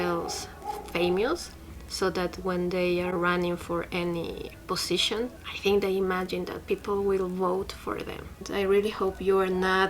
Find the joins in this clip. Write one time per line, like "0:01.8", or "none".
0:04.5
0:05.5
0:08.4